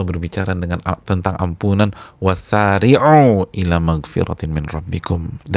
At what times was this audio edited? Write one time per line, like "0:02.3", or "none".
none